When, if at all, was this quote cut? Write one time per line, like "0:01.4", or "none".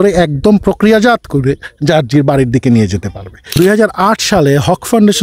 0:03.5